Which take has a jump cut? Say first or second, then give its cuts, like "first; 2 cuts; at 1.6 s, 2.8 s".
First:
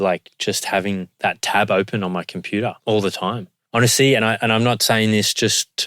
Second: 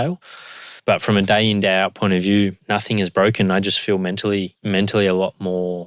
first; 1 cut; at 3.5 s